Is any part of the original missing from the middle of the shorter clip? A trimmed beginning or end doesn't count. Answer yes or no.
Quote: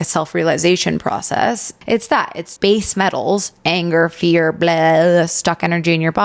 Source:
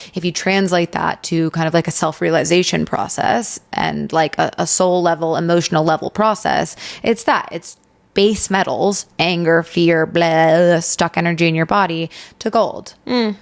yes